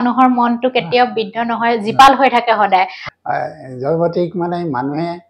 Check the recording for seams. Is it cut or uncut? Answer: cut